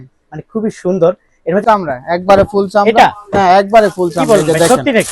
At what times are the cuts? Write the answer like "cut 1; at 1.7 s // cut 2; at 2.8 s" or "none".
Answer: cut 1; at 1.6 s

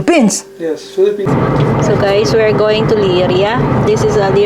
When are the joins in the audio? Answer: cut 1; at 1.2 s

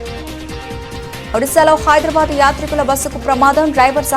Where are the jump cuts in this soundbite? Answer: cut 1; at 1.3 s

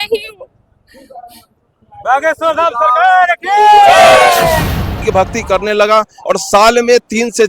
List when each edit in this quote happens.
cut 1; at 5.0 s

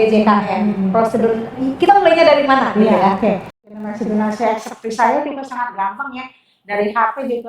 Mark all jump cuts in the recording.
cut 1; at 3.9 s

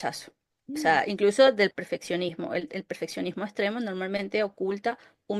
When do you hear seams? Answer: none

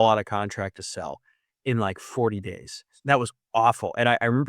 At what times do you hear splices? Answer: cut 1; at 2.9 s

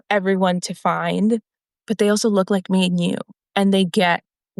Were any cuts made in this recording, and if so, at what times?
cut 1; at 1.6 s

